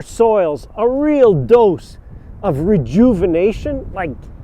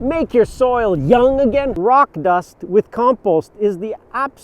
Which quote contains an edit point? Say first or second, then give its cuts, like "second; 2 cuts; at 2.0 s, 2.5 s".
second; 1 cut; at 1.7 s